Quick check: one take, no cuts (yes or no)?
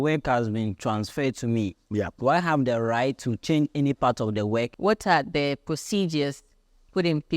no